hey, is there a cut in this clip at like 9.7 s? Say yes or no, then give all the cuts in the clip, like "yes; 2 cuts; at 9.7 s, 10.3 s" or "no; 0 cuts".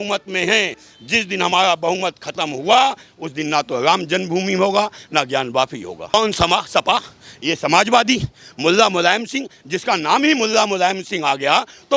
no; 1 cut; at 6.1 s